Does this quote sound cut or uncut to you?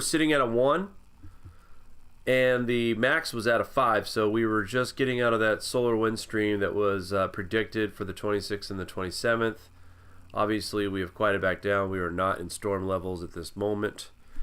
cut